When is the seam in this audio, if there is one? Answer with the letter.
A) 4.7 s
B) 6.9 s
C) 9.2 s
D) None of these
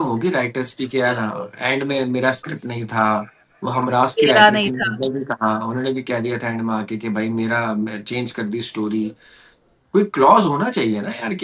D